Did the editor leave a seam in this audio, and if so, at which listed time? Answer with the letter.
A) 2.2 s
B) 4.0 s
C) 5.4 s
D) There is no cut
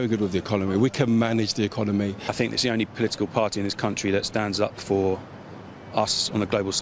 A